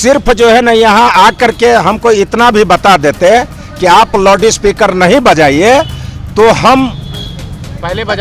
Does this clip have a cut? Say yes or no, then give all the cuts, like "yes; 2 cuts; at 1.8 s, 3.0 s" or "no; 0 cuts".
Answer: no; 0 cuts